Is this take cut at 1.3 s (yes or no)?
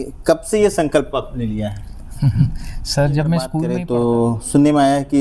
no